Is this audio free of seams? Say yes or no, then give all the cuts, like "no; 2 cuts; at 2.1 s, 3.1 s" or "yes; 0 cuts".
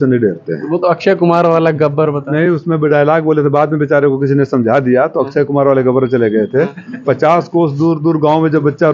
yes; 0 cuts